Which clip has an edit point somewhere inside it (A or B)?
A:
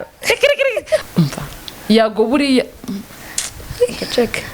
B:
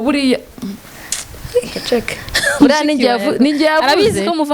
A